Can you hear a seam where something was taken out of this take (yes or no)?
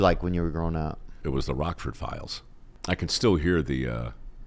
yes